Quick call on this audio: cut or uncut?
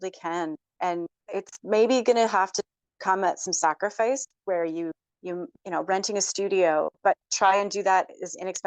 cut